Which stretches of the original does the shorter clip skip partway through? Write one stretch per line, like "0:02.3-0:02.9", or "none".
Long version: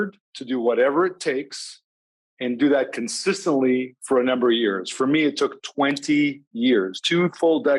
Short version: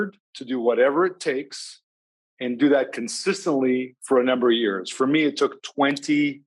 none